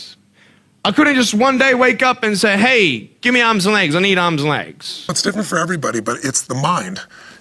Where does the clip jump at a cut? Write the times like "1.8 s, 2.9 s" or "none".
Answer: 5.2 s